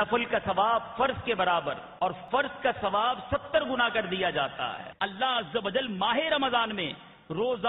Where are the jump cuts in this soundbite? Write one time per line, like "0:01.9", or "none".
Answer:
0:02.2
0:04.8